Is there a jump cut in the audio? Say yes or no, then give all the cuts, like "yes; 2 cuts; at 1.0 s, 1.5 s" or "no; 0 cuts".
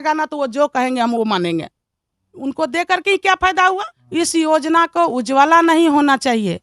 yes; 1 cut; at 3.9 s